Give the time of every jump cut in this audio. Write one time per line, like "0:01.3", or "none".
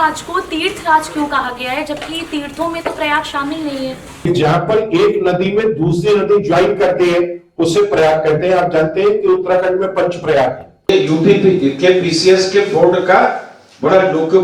0:04.3
0:10.9